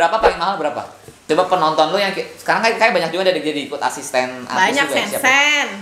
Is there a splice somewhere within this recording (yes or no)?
yes